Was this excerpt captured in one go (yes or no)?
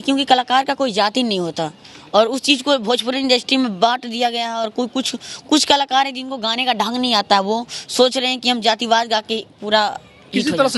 yes